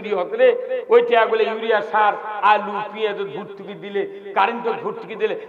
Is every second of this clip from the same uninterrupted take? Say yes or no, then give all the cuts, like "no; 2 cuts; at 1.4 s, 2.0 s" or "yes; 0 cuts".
yes; 0 cuts